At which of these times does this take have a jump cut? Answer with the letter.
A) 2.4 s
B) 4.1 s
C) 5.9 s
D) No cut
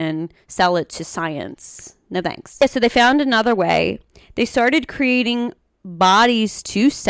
A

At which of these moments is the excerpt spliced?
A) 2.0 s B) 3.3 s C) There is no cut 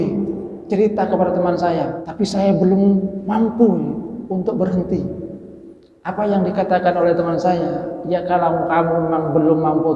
A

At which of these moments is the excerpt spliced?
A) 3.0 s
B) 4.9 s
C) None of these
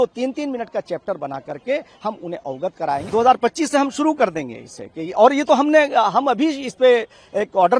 A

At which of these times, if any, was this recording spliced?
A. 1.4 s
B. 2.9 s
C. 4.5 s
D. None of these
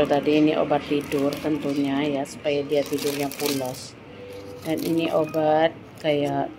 D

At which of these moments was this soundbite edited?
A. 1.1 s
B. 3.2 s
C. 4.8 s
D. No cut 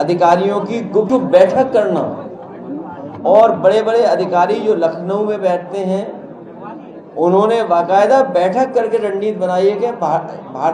A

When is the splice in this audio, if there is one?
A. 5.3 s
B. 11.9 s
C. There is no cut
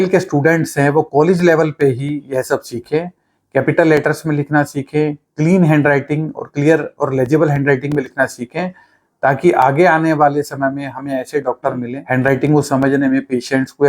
B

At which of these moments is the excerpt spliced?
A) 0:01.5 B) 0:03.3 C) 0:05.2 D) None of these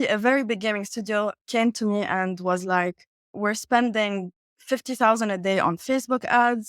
B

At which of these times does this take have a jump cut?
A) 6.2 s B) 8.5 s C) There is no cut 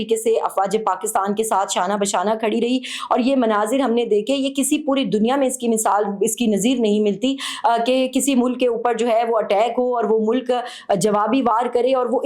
C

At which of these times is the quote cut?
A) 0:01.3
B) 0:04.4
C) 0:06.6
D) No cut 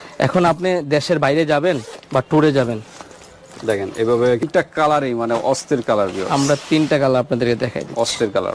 B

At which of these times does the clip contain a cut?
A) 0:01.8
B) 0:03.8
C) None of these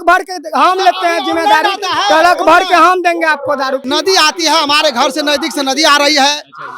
B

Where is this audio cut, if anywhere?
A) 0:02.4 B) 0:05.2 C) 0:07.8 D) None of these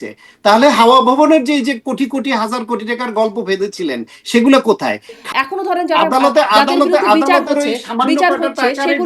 B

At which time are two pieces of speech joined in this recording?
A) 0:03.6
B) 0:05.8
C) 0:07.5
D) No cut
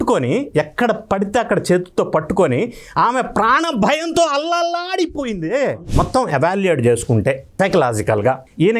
B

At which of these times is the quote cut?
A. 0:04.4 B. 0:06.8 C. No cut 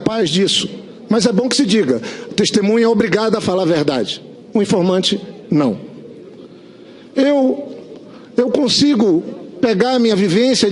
A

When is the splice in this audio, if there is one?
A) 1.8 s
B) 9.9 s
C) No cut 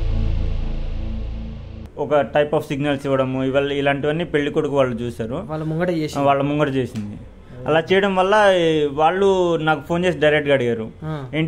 A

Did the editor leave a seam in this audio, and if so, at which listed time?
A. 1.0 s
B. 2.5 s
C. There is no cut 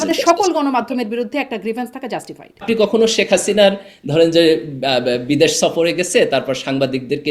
B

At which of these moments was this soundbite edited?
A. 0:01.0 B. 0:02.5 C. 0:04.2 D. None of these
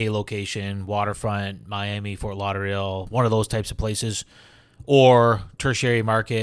D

